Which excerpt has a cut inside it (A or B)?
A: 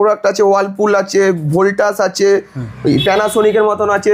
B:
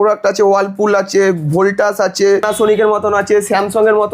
B